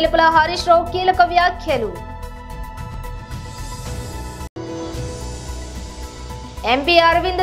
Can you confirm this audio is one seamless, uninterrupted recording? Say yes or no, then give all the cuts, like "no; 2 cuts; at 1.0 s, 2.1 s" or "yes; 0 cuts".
yes; 0 cuts